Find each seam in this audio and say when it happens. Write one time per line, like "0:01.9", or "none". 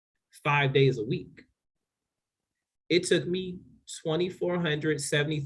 none